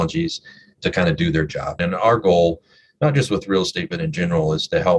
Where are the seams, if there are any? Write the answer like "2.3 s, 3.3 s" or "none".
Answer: 1.8 s